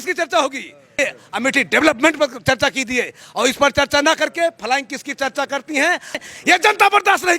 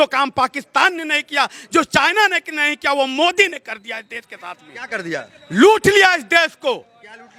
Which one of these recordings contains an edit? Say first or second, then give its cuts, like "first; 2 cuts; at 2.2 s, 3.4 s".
first; 2 cuts; at 1.0 s, 6.2 s